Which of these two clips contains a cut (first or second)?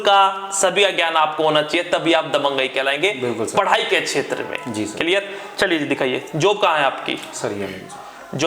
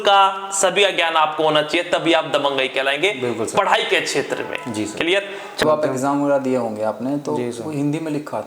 second